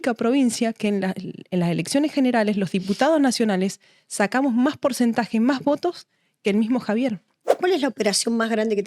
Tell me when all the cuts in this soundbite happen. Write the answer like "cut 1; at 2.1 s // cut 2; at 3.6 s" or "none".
cut 1; at 7.5 s